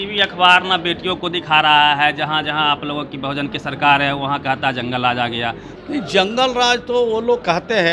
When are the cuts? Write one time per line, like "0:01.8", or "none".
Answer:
0:05.7